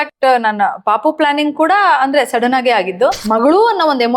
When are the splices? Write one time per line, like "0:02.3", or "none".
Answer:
0:03.2